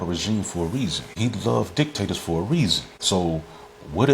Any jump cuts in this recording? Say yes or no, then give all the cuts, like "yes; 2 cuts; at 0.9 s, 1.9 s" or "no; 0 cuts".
yes; 2 cuts; at 1.0 s, 2.9 s